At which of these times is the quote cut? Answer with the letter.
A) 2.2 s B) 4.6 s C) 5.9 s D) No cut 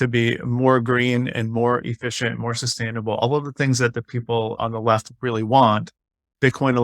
B